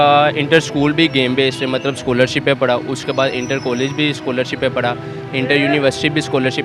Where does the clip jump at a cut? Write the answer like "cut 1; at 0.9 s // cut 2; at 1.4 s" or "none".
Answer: none